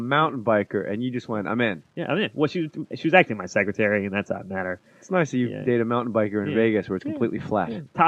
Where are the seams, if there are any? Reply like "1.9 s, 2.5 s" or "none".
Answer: 1.2 s